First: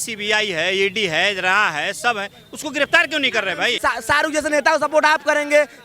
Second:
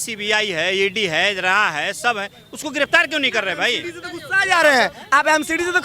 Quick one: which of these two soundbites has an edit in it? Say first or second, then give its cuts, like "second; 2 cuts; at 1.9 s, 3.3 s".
first; 1 cut; at 3.7 s